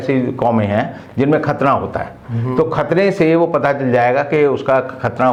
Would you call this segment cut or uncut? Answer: uncut